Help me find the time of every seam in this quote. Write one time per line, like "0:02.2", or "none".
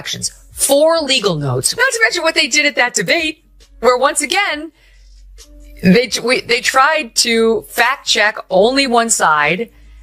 0:01.7

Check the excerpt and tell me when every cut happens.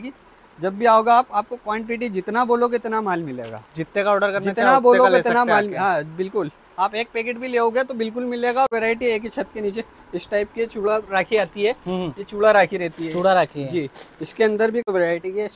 0:08.7
0:14.8

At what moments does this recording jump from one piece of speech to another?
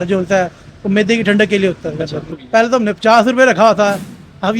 0:02.3

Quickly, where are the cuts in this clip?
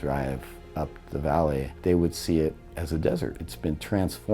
0:01.7
0:03.5

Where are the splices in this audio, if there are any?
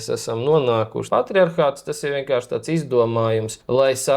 0:01.0

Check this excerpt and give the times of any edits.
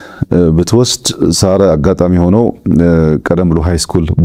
none

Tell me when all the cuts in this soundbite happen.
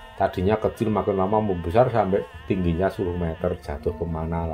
none

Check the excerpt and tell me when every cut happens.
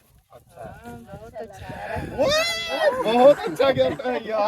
none

